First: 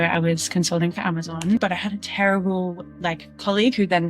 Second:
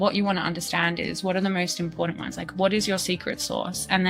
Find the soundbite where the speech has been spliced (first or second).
first